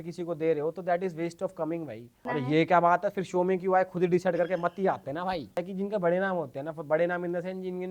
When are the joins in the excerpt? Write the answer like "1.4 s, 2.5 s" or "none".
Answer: 2.1 s, 5.6 s

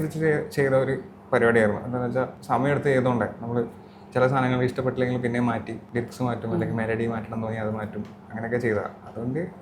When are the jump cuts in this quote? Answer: 2.4 s, 5.8 s

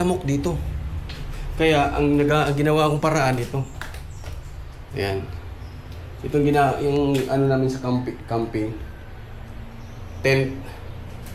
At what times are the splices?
none

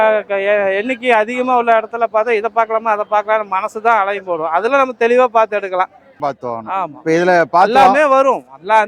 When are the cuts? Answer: 6.3 s

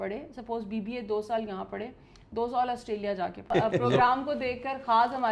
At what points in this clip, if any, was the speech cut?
3.4 s

